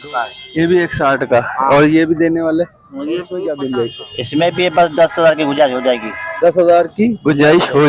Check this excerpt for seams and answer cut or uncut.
cut